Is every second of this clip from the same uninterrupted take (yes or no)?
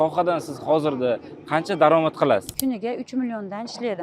no